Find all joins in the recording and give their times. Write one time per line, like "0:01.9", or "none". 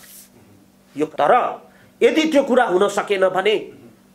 0:01.1